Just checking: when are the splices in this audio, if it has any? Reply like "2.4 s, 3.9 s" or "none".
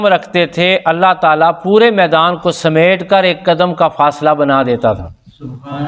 none